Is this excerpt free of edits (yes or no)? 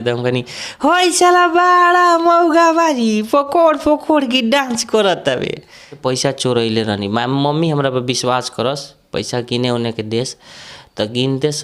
no